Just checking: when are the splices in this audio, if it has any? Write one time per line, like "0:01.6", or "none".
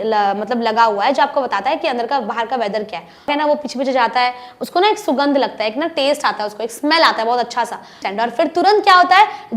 0:03.3
0:08.0